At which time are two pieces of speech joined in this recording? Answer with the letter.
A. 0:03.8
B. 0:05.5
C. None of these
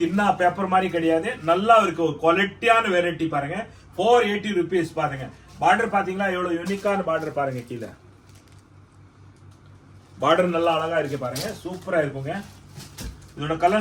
C